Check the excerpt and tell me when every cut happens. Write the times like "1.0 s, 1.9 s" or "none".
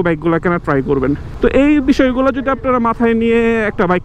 1.3 s